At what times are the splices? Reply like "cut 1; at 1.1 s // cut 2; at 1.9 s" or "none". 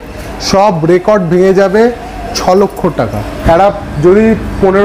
cut 1; at 3.3 s

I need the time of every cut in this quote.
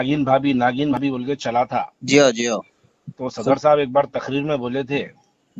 cut 1; at 1.0 s

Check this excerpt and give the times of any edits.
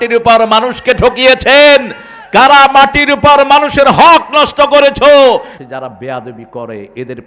cut 1; at 5.6 s

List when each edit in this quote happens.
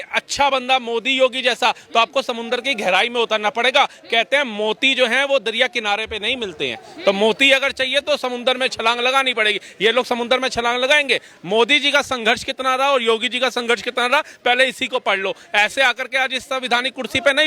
none

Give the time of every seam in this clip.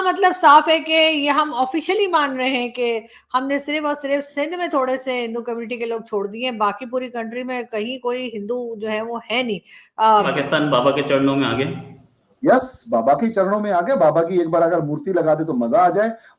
cut 1; at 10.3 s

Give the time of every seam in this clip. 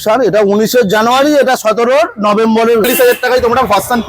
cut 1; at 2.8 s

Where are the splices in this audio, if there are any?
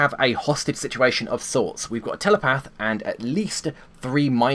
none

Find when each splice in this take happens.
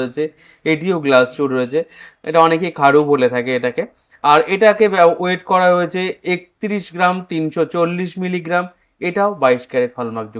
none

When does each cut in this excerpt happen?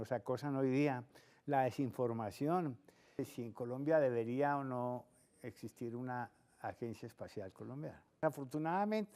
cut 1; at 3.3 s // cut 2; at 8.2 s

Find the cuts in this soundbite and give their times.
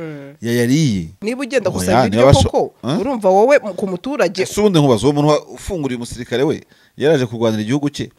cut 1; at 1.1 s

